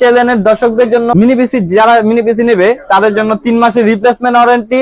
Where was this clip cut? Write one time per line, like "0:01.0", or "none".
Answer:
0:01.1